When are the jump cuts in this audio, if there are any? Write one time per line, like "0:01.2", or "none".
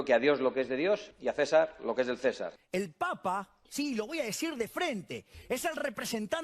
0:01.2
0:02.5

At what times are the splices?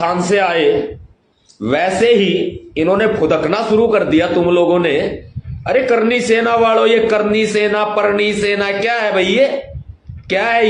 none

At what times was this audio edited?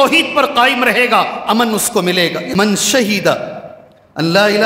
0:02.5

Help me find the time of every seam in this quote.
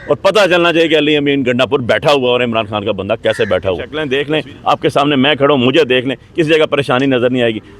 0:03.9

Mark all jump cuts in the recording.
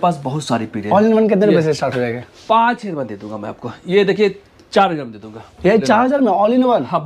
none

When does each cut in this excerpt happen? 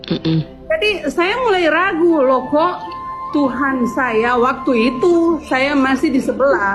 none

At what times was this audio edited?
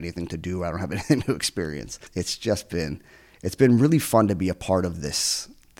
0:02.1

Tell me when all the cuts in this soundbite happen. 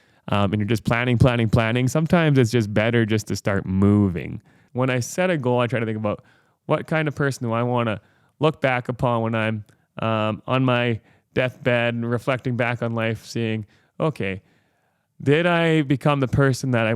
0:04.6

